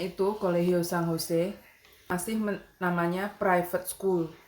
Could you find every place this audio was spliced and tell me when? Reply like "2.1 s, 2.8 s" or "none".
2.2 s